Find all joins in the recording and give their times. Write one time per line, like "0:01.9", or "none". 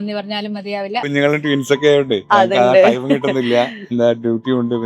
0:01.1